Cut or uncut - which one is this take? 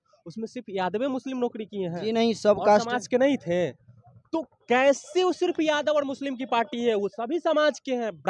uncut